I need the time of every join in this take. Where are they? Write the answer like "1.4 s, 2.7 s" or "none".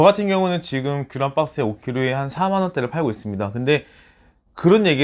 none